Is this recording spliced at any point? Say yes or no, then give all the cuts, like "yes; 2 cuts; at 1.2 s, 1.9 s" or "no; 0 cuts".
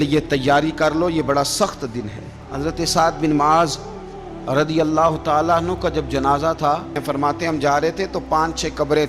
yes; 2 cuts; at 2.4 s, 7.0 s